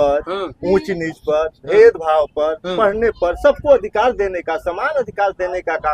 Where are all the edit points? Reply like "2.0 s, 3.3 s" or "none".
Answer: none